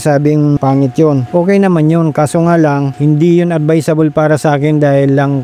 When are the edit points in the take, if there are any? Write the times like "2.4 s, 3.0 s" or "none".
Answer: 1.1 s